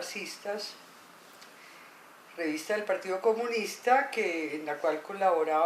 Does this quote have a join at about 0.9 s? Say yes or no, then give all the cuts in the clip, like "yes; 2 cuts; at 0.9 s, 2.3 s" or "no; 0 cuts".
yes; 1 cut; at 0.9 s